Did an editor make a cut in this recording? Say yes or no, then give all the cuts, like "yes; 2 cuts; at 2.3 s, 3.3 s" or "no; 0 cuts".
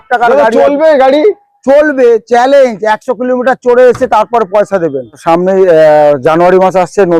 yes; 1 cut; at 5.2 s